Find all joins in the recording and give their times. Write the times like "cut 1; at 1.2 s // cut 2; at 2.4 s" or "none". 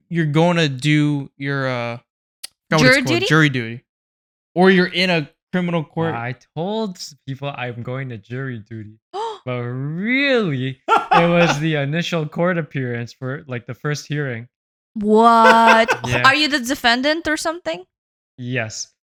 none